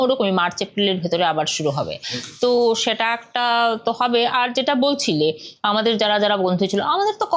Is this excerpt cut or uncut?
uncut